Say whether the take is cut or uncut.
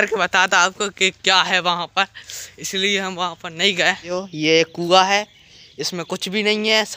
cut